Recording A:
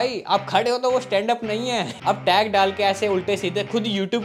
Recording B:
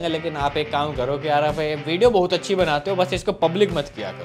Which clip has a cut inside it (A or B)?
A